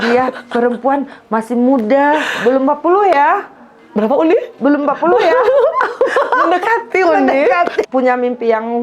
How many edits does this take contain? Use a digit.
1